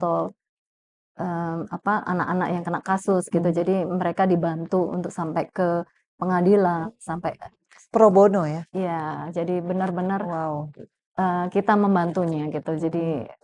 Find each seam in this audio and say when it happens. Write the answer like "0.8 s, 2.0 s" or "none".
none